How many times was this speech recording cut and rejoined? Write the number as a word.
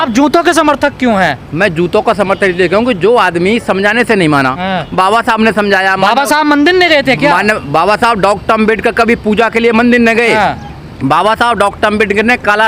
zero